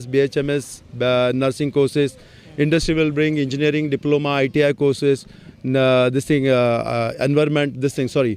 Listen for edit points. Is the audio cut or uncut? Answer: uncut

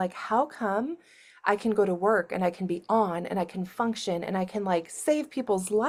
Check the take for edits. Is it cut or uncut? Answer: uncut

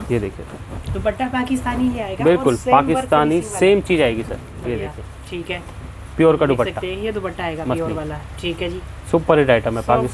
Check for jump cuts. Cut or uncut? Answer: uncut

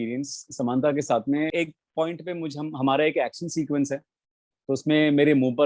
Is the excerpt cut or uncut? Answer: cut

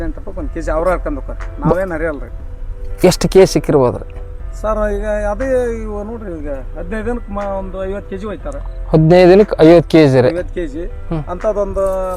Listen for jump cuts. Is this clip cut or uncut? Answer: uncut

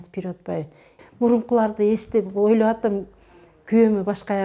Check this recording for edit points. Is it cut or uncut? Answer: cut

